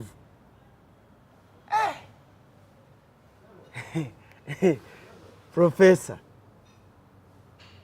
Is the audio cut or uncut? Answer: uncut